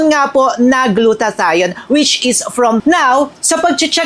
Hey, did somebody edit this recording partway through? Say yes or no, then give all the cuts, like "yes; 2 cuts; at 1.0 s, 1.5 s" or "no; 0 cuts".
yes; 1 cut; at 2.8 s